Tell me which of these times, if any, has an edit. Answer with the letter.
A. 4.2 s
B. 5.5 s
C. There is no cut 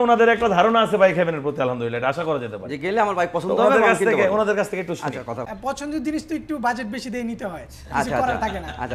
B